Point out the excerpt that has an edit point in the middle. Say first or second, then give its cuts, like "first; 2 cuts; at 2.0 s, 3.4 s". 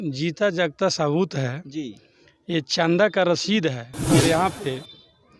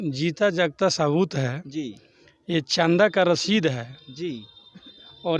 first; 1 cut; at 3.9 s